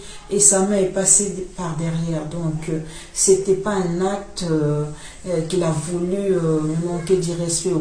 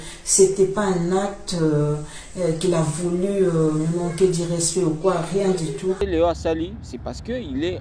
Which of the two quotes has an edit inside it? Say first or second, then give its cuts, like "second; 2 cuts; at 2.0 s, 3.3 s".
second; 1 cut; at 6.0 s